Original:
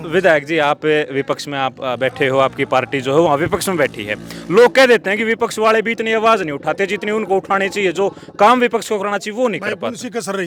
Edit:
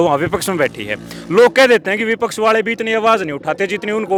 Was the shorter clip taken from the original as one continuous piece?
yes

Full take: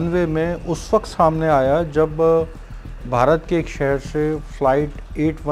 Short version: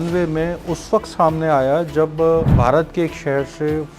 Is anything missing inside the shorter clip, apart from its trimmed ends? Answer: yes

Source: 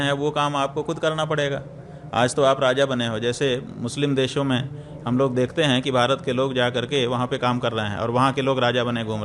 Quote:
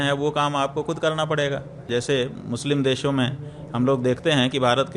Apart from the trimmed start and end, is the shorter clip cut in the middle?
yes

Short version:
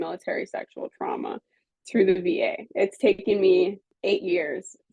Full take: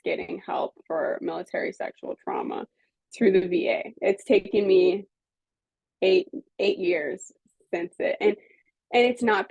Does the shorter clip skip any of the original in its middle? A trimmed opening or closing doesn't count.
yes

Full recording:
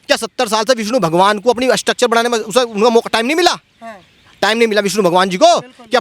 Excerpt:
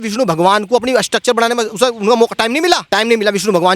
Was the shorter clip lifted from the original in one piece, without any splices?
no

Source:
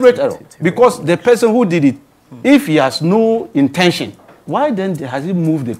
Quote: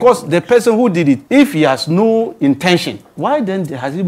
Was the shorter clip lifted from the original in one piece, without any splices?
no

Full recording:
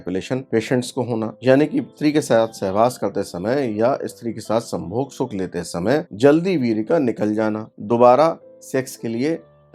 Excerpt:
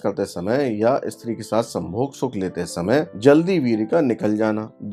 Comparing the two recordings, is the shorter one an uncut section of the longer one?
yes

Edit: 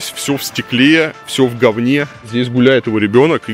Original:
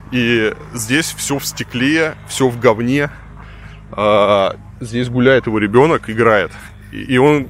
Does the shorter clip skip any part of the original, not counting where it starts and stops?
yes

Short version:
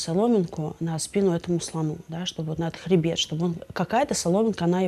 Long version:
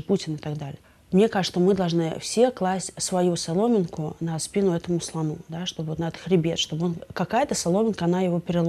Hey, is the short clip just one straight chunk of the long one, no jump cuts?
yes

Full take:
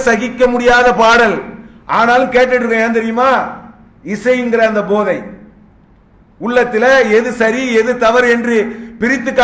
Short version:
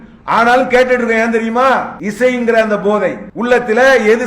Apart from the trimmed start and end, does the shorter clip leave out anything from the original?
yes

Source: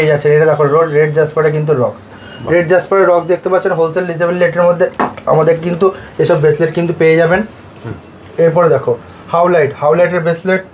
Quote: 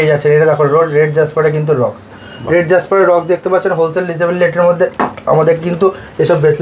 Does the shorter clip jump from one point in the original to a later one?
no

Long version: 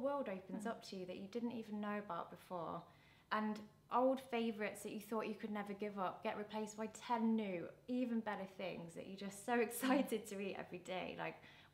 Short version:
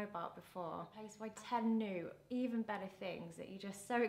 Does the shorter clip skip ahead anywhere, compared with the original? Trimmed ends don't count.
yes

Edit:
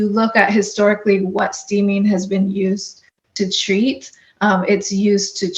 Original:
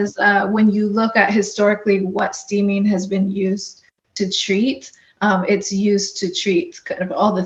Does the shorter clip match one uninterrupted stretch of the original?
yes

